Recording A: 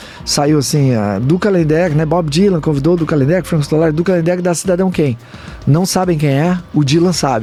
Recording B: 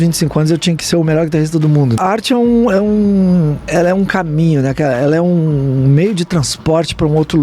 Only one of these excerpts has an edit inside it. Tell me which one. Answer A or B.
B